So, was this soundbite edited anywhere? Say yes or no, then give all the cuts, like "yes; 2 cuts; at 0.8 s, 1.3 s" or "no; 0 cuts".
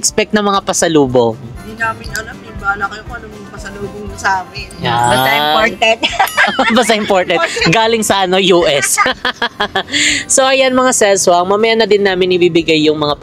no; 0 cuts